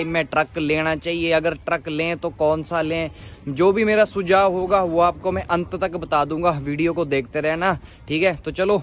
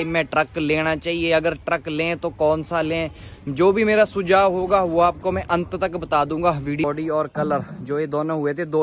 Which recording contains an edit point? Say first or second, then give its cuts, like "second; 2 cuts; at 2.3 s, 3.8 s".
second; 1 cut; at 6.8 s